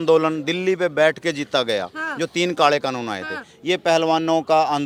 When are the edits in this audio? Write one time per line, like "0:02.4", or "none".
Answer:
none